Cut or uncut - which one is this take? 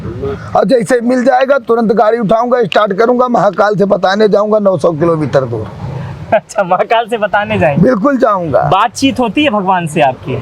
uncut